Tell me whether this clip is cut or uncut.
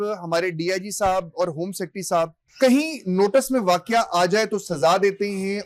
uncut